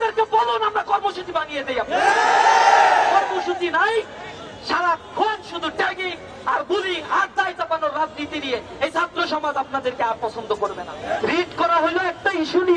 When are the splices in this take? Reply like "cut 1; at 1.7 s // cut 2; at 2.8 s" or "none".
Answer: cut 1; at 11.2 s